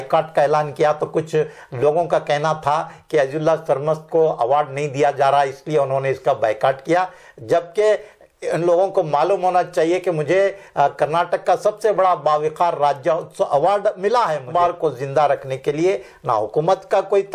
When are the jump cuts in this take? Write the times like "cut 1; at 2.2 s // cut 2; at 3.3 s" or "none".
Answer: cut 1; at 14.5 s